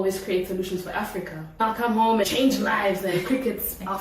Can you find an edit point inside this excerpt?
yes; 1 cut; at 1.6 s

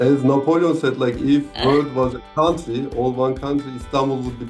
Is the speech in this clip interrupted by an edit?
yes; 1 cut; at 1.5 s

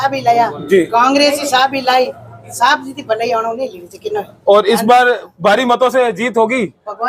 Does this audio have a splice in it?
no; 0 cuts

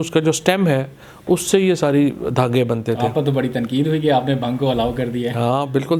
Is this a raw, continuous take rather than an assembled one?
yes; 0 cuts

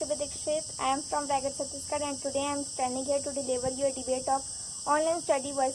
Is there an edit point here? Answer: no; 0 cuts

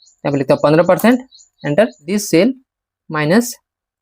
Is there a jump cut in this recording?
yes; 1 cut; at 2.1 s

